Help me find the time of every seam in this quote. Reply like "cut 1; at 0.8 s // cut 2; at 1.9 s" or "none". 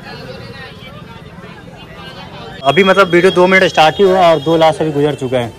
cut 1; at 2.6 s